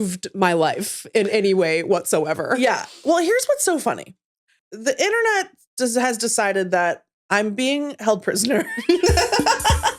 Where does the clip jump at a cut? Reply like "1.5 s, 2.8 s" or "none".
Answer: 4.6 s

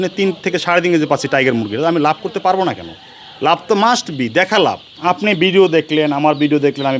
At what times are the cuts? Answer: 4.9 s

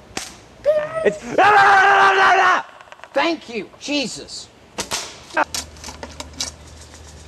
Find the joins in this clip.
5.4 s

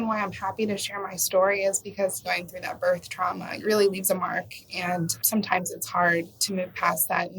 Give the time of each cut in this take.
2.2 s, 3.5 s, 5.2 s

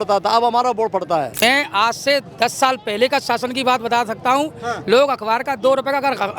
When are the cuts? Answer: 1.3 s

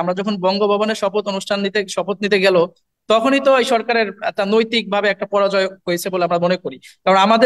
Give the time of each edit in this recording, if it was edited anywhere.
none

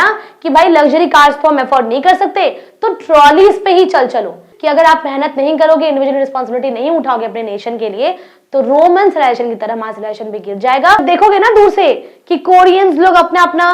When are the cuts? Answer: 4.5 s, 11.0 s

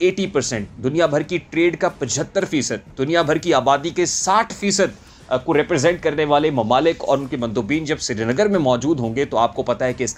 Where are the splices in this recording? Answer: none

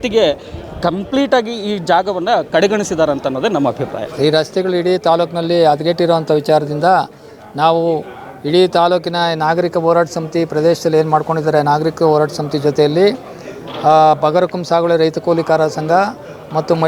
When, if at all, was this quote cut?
4.1 s

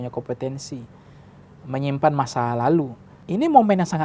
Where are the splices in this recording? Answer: 3.0 s

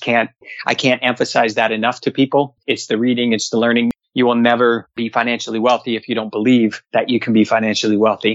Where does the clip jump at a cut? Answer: 2.6 s, 3.9 s, 5.0 s, 6.8 s

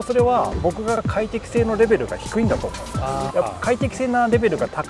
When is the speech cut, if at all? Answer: 3.3 s

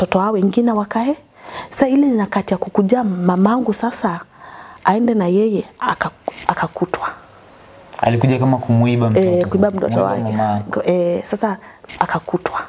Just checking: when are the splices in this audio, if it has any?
11.8 s

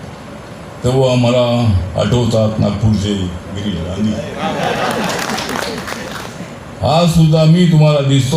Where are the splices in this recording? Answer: 6.5 s

